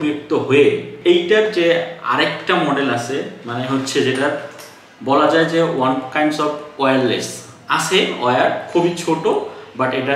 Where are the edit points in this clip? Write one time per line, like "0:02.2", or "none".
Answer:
0:00.9